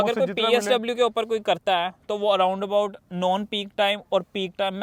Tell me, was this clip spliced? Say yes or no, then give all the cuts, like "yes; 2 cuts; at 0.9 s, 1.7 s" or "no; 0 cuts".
no; 0 cuts